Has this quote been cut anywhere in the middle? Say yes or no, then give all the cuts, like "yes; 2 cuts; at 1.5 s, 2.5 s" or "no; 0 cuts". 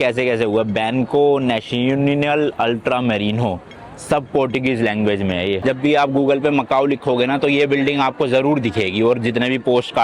yes; 1 cut; at 5.6 s